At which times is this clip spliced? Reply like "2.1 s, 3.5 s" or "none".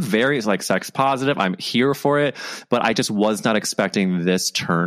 none